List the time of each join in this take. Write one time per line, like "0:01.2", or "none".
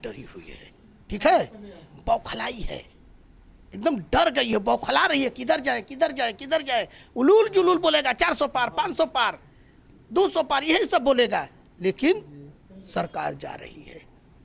none